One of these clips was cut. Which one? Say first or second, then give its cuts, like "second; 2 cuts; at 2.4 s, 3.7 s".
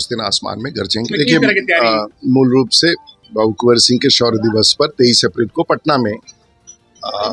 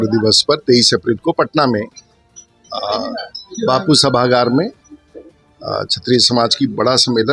first; 1 cut; at 1.1 s